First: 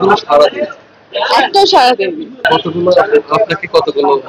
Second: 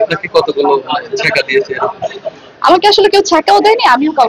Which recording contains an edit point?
first; 1 cut; at 2.5 s

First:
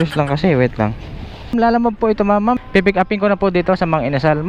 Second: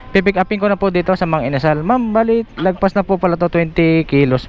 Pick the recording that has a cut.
first; 1 cut; at 1.5 s

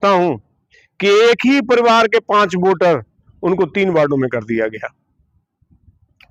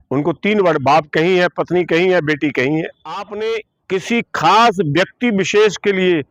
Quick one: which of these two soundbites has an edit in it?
second; 1 cut; at 3.3 s

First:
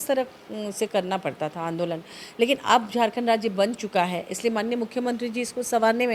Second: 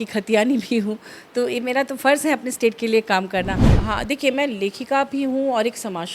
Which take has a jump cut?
second; 1 cut; at 3.7 s

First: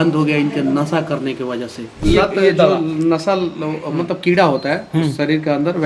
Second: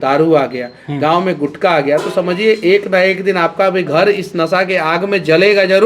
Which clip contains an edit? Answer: first; 1 cut; at 2.0 s

